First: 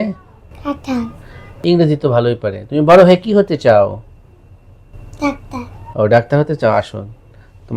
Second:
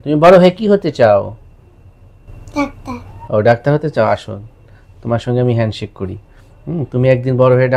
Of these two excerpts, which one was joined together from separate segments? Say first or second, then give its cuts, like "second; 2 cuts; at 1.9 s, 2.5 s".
first; 1 cut; at 1.6 s